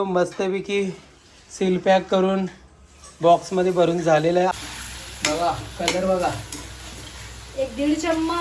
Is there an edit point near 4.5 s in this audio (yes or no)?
yes